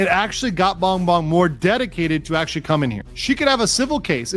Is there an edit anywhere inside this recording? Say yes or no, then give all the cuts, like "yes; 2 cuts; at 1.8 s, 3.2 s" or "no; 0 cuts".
yes; 1 cut; at 3.1 s